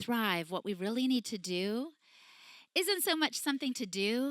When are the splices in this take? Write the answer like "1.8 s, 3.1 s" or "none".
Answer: none